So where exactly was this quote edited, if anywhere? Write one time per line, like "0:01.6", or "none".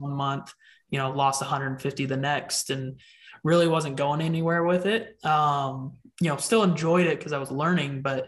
none